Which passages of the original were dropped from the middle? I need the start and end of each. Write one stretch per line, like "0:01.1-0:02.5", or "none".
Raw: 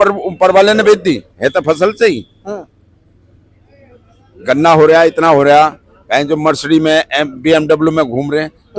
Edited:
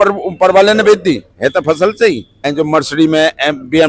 0:02.5-0:06.2